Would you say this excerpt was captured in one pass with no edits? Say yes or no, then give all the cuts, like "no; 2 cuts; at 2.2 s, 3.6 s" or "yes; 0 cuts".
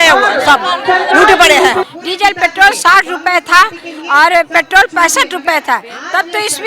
no; 1 cut; at 1.9 s